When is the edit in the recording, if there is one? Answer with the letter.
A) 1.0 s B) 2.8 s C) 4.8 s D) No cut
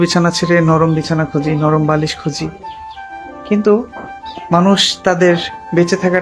D